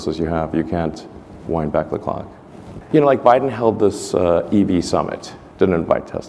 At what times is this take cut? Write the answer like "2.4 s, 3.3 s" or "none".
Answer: none